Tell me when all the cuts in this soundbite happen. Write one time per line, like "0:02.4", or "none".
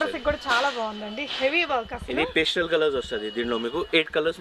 none